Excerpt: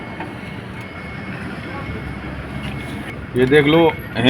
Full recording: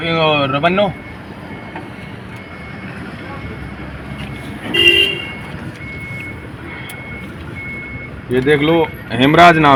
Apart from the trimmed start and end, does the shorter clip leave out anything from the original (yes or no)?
yes